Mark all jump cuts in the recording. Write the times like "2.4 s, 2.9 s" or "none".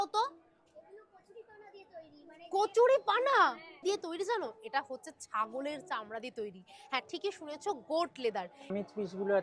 3.8 s, 8.7 s